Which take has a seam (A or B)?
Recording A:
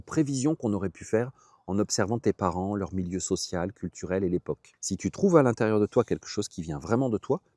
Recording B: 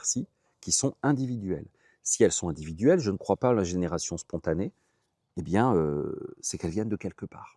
A